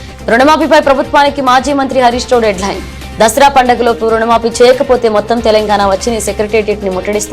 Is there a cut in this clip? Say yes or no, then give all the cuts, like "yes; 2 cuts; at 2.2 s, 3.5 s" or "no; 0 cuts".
no; 0 cuts